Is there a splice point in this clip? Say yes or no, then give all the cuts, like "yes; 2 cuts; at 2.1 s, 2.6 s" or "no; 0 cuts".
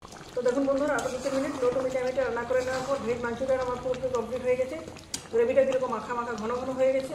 no; 0 cuts